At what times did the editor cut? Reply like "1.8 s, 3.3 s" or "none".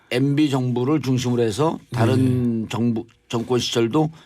1.8 s